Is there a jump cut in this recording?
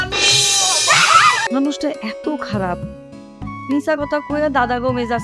yes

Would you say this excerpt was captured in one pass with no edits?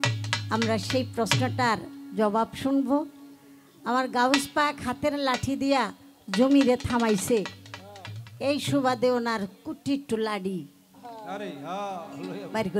yes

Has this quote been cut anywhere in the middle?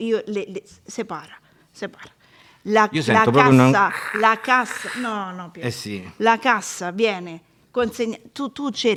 no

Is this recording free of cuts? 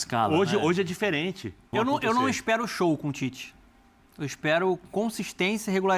no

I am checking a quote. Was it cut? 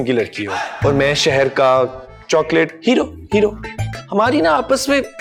no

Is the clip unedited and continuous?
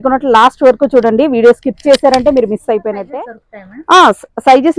no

